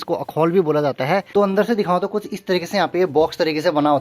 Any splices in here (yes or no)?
yes